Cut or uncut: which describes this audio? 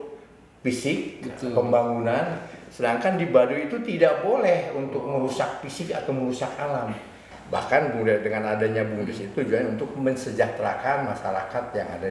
cut